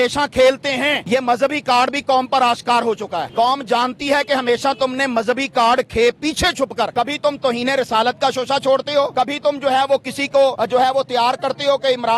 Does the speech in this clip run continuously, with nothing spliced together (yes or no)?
no